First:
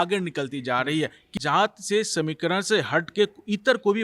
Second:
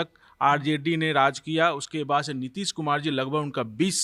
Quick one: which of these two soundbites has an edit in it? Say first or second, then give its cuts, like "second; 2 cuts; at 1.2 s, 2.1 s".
first; 1 cut; at 1.3 s